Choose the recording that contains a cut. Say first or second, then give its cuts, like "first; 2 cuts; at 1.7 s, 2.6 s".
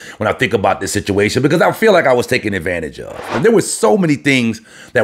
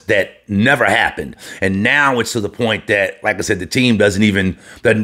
first; 1 cut; at 3.3 s